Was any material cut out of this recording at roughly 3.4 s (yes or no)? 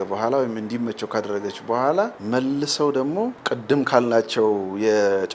yes